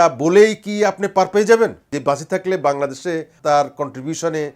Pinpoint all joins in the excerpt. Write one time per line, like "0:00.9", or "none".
0:01.9
0:03.3